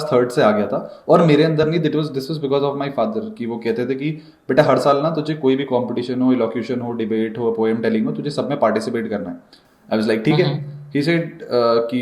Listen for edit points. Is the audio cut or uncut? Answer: uncut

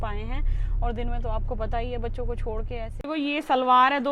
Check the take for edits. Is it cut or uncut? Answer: cut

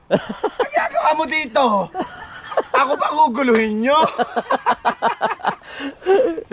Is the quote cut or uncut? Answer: cut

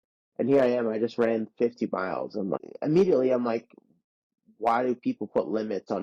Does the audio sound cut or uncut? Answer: cut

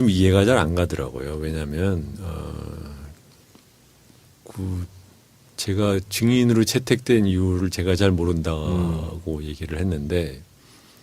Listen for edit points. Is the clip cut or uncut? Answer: cut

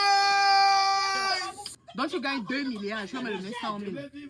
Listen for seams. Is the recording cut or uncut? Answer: cut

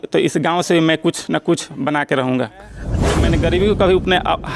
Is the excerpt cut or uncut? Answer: cut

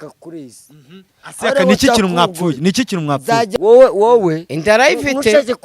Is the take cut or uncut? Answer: cut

